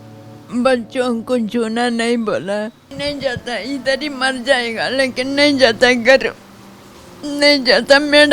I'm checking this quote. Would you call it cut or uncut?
cut